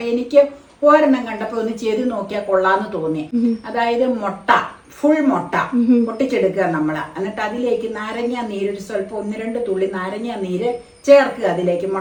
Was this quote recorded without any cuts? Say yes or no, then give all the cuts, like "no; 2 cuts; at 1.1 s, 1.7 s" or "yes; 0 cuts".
yes; 0 cuts